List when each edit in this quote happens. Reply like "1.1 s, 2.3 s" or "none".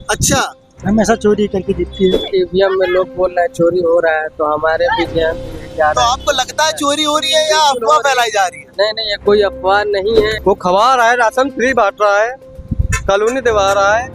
2.2 s, 10.4 s